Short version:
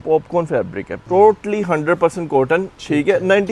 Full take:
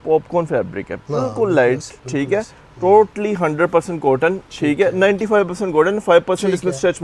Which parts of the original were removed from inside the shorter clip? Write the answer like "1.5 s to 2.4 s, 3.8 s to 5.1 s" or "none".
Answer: 0.9 s to 2.6 s